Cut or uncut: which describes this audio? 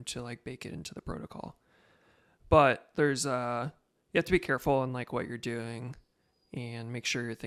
uncut